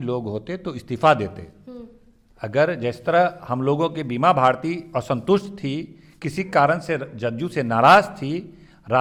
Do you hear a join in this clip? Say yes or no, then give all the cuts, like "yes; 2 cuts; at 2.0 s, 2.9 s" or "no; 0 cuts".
no; 0 cuts